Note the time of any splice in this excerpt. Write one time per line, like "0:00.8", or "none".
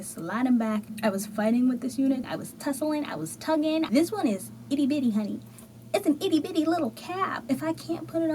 0:00.9
0:03.9
0:07.3